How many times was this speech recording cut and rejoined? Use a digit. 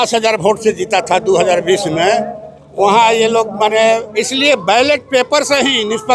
1